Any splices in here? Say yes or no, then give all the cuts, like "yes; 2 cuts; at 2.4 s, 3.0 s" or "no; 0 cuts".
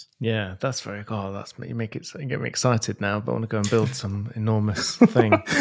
no; 0 cuts